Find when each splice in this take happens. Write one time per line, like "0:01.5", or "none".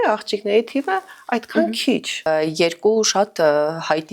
0:02.3